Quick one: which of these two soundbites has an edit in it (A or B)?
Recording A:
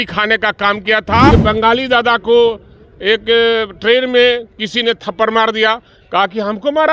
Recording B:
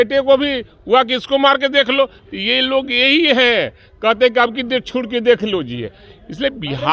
A